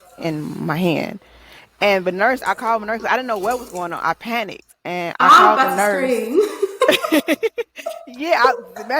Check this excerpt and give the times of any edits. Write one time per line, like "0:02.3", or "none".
0:07.8